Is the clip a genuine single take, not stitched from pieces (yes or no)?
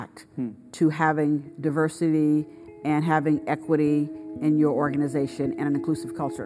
yes